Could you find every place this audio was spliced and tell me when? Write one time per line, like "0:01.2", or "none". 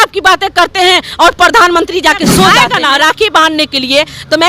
0:02.6